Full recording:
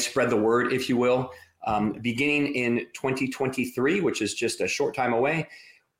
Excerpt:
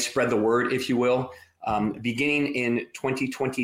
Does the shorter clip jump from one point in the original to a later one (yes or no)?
no